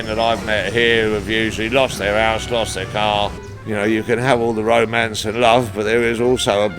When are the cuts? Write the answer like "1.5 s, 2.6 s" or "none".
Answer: 3.5 s